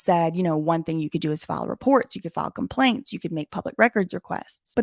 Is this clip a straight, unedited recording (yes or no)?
yes